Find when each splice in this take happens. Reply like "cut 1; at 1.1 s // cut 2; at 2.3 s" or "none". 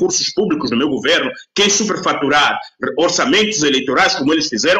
none